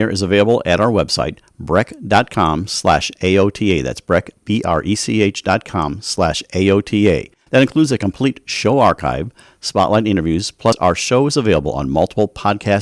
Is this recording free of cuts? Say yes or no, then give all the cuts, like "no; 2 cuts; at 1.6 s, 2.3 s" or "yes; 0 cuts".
yes; 0 cuts